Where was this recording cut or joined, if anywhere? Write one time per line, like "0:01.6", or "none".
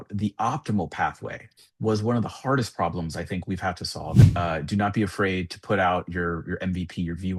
0:04.2